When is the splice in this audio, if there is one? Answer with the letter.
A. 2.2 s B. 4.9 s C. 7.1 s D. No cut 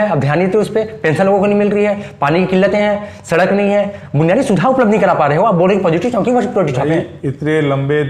D